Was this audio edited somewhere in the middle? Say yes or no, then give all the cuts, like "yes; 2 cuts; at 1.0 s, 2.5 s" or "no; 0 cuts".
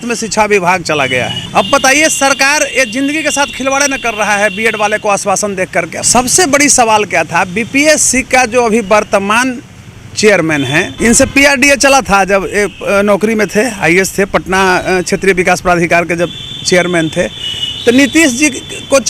yes; 3 cuts; at 1.4 s, 6.0 s, 10.9 s